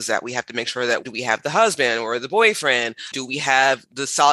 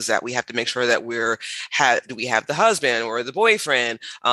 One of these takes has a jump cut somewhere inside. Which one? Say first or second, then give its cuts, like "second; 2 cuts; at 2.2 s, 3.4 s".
first; 2 cuts; at 1.1 s, 3.1 s